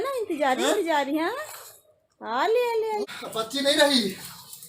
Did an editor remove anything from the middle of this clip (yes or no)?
yes